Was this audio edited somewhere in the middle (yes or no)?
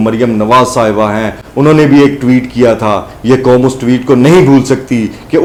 no